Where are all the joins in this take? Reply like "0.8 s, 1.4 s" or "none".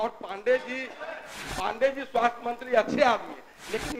1.3 s